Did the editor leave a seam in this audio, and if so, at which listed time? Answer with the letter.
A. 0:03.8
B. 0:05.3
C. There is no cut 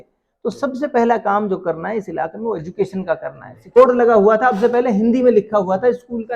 A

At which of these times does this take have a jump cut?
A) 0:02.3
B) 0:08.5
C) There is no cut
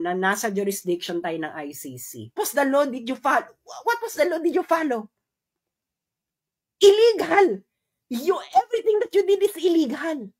A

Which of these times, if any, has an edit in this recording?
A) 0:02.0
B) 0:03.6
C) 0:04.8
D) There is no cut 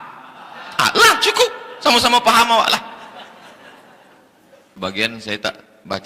C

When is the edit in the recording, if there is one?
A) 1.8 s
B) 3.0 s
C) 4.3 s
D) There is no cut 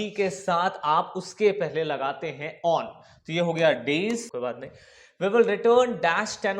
C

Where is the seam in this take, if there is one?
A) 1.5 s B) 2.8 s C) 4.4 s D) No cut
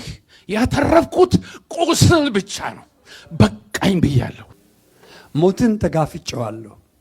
C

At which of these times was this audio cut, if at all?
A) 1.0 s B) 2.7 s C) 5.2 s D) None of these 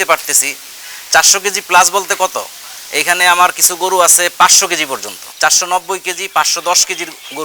C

